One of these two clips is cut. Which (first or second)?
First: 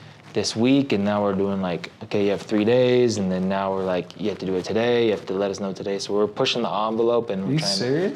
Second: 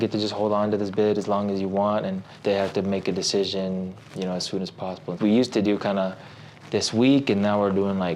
second